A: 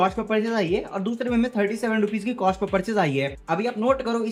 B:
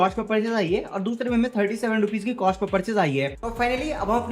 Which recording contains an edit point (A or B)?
B